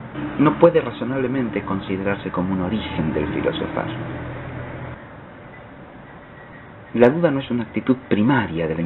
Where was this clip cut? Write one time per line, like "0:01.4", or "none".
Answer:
none